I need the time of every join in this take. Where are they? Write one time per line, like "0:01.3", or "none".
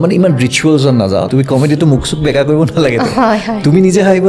0:01.3